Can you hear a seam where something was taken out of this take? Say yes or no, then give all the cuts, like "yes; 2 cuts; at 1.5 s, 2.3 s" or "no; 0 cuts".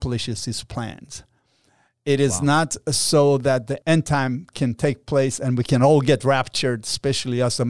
yes; 1 cut; at 3.8 s